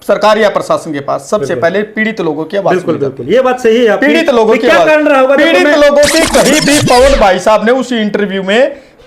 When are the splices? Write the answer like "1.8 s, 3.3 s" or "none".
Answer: none